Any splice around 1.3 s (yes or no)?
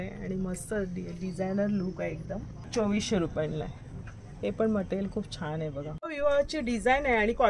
no